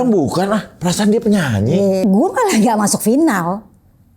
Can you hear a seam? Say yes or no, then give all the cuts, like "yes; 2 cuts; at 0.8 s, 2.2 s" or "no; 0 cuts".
yes; 1 cut; at 2.0 s